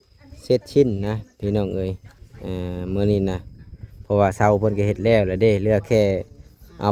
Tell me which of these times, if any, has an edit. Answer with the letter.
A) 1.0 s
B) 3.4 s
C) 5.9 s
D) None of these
D